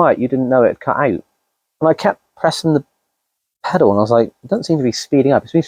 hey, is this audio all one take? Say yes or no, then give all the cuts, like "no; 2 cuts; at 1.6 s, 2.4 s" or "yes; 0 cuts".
yes; 0 cuts